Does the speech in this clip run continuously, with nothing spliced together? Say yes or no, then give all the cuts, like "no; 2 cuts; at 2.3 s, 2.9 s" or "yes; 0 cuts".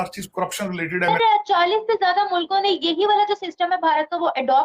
no; 1 cut; at 1.1 s